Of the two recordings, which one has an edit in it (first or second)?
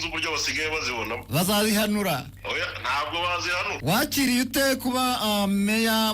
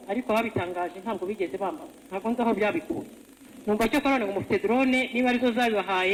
first